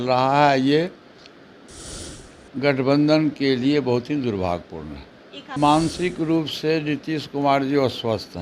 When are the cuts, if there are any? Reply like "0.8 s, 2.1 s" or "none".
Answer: 5.6 s